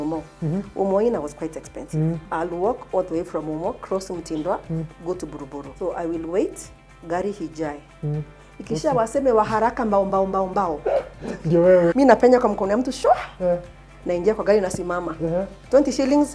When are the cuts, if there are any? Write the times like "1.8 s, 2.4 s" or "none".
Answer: 2.3 s, 5.6 s, 11.9 s